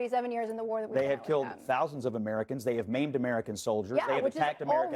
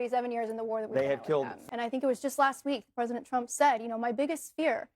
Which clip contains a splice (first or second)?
second